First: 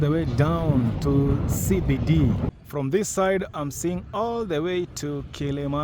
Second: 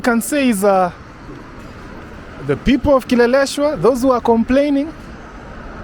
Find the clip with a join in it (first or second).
first